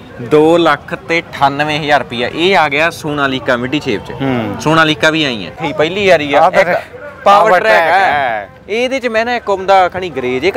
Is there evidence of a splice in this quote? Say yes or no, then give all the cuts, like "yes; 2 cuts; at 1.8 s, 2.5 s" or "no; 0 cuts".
yes; 1 cut; at 5.5 s